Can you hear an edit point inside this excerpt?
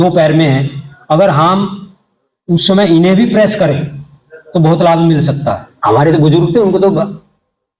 yes; 1 cut; at 5.7 s

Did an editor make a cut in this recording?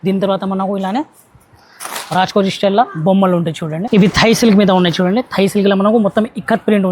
yes; 1 cut; at 3.8 s

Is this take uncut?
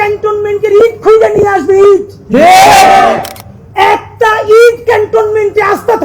yes; 0 cuts

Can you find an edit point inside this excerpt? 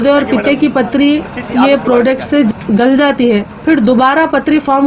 no; 0 cuts

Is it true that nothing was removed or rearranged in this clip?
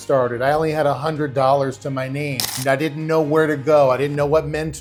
yes; 0 cuts

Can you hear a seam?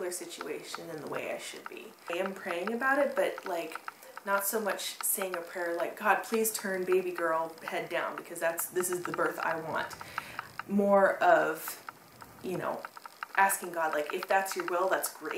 yes; 1 cut; at 1.9 s

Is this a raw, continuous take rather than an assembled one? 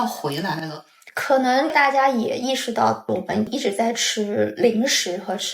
no; 2 cuts; at 1.7 s, 3.5 s

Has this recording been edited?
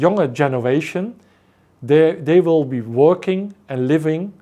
no; 0 cuts

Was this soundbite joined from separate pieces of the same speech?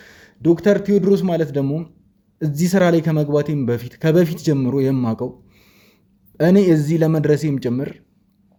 no; 0 cuts

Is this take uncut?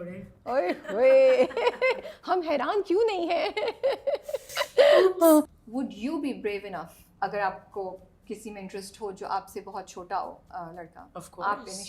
no; 2 cuts; at 5.6 s, 7.0 s

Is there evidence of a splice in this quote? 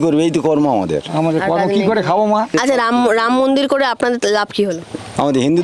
yes; 1 cut; at 2.5 s

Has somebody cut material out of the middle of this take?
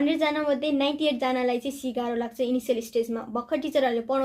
no; 0 cuts

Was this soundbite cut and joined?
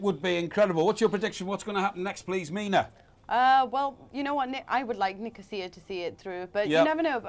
yes; 1 cut; at 2.4 s

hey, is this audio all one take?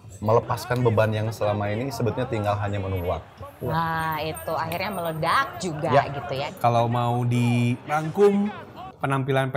no; 1 cut; at 6.4 s

